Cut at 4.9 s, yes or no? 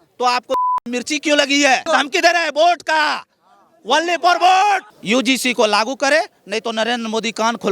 yes